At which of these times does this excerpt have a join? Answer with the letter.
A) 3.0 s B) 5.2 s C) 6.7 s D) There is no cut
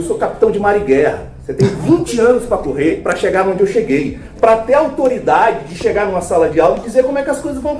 A